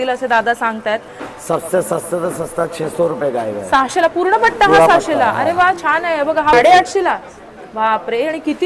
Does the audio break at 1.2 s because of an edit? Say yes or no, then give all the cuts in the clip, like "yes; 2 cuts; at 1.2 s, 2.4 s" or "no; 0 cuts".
yes; 2 cuts; at 1.2 s, 6.5 s